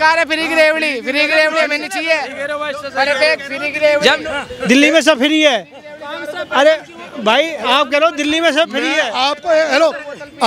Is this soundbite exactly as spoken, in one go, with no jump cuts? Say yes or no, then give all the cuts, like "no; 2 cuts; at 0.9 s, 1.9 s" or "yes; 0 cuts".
yes; 0 cuts